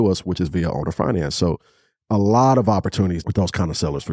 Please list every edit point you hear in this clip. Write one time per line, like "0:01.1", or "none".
0:03.2